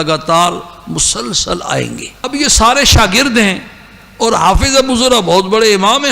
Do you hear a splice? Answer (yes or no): yes